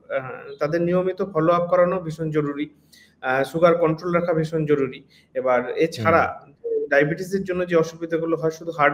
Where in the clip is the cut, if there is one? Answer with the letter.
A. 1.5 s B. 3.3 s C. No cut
C